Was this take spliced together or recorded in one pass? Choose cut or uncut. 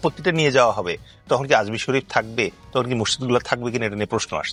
uncut